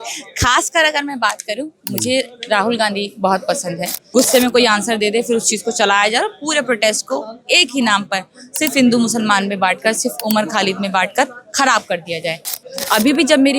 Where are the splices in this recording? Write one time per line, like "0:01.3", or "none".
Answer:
0:04.2
0:12.6